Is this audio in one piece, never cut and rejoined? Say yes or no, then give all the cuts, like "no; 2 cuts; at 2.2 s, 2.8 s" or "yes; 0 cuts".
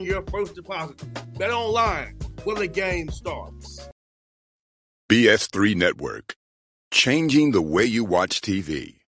no; 1 cut; at 3.8 s